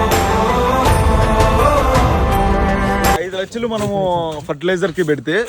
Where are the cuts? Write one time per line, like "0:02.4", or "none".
0:03.2